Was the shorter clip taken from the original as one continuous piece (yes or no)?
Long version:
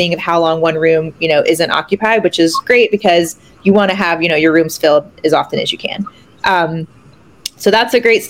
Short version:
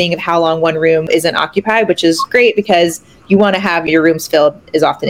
no